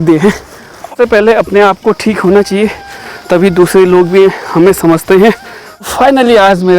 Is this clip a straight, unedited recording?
no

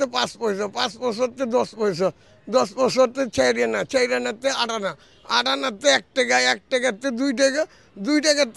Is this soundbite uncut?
yes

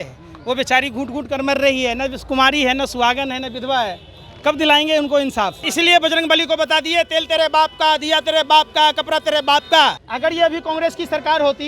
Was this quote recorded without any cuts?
no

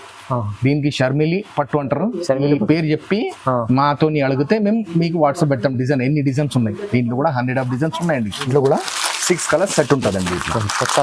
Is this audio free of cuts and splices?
no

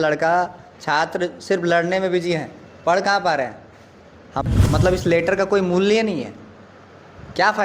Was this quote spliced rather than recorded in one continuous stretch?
yes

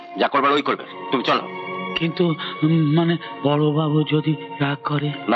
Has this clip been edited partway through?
no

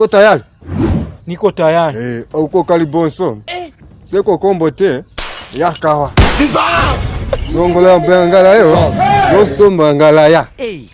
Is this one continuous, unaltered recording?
yes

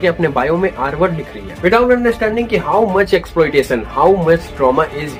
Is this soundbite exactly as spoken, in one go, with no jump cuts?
yes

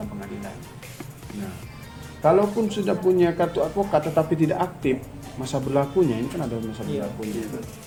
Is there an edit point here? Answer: no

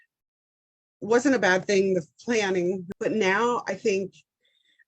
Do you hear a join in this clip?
yes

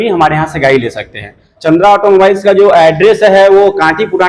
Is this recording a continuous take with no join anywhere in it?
no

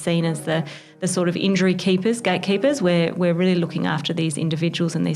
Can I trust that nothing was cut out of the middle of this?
yes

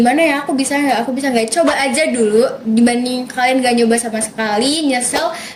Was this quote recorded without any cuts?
yes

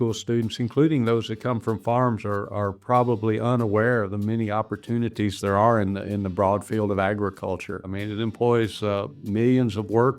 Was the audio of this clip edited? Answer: yes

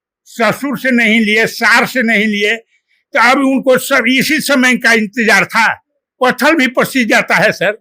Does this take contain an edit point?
no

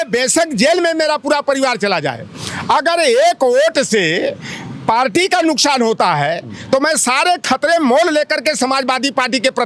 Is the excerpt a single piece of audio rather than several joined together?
yes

